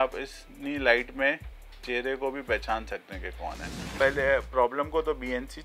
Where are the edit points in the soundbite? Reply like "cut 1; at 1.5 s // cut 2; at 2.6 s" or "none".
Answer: cut 1; at 3.9 s